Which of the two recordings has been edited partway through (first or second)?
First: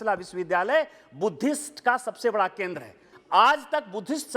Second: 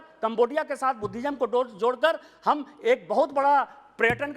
first